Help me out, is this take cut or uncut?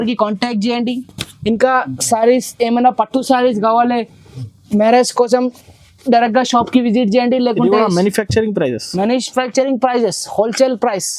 uncut